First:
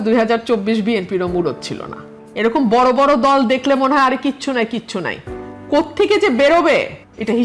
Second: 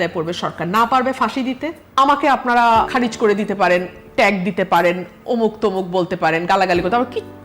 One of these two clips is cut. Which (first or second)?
second